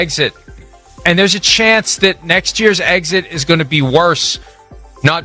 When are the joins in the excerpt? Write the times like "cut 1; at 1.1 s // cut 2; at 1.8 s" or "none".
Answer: none

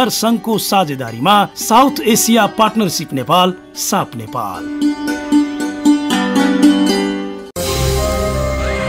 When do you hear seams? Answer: cut 1; at 7.4 s

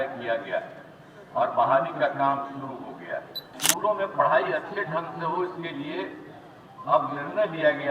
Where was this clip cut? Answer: cut 1; at 3.5 s

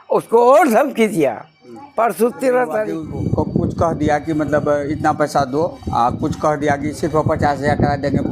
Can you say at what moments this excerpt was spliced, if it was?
cut 1; at 3.0 s

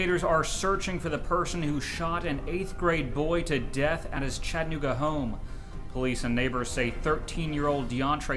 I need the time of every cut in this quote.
none

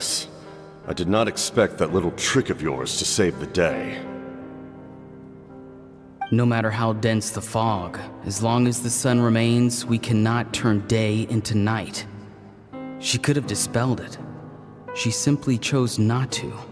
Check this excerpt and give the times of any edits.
none

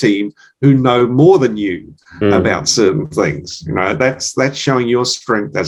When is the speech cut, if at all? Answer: none

